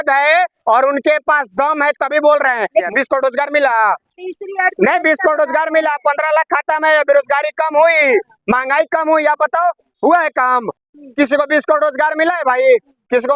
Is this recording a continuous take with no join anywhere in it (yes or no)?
no